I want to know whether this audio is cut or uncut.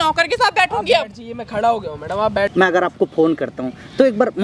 cut